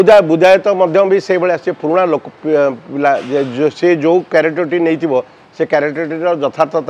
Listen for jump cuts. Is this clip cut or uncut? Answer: uncut